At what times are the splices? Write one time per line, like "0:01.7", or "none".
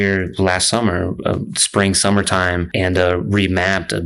0:02.7